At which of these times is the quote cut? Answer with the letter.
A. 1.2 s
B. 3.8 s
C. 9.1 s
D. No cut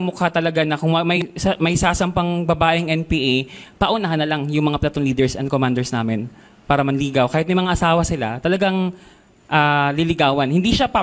A